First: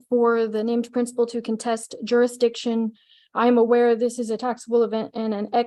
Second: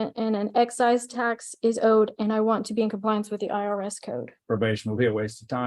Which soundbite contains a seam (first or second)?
second